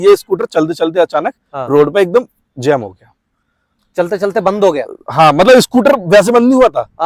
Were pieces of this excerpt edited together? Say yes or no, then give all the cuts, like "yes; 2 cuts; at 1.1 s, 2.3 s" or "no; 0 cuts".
no; 0 cuts